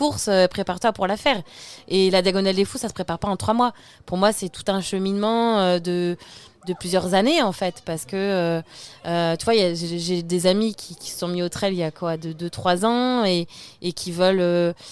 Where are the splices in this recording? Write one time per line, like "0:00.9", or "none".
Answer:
none